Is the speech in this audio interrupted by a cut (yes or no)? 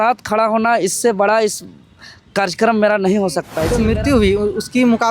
yes